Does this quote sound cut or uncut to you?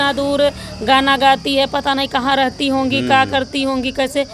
uncut